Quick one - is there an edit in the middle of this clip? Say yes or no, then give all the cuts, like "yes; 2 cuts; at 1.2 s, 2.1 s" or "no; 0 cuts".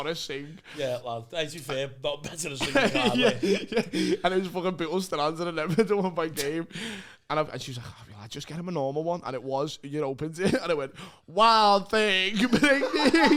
no; 0 cuts